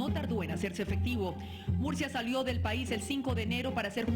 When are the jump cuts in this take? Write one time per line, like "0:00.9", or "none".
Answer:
0:01.3